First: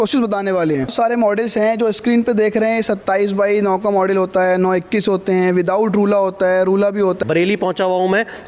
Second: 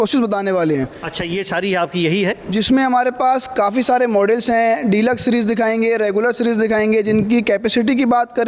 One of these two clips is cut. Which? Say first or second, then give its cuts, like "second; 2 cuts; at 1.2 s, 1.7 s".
first; 2 cuts; at 0.9 s, 7.2 s